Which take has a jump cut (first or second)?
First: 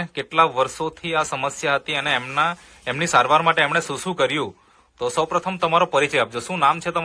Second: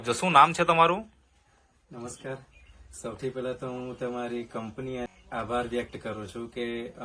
second